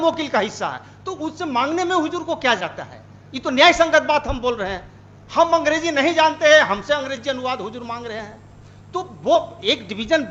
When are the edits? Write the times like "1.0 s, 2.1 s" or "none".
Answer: none